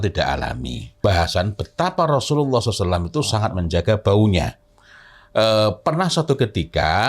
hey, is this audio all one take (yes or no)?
no